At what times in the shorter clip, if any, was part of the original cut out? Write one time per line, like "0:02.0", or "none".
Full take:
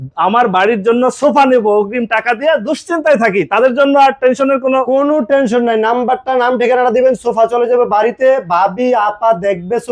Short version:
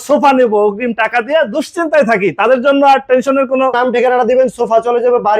0:03.7